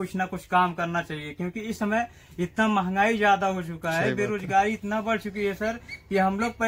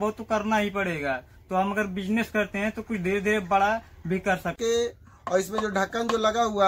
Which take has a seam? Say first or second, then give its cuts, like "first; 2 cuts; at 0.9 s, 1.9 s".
second; 1 cut; at 4.6 s